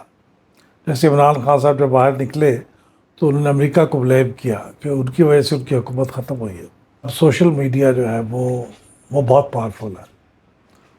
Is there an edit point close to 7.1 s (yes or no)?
yes